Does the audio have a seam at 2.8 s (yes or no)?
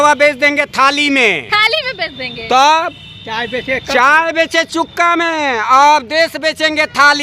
no